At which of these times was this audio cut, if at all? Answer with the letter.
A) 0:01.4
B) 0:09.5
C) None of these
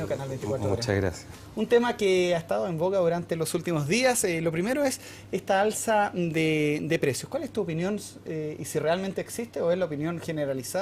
C